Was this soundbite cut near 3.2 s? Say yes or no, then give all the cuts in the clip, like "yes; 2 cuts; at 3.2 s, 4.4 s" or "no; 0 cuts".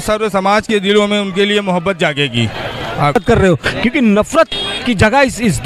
yes; 1 cut; at 3.2 s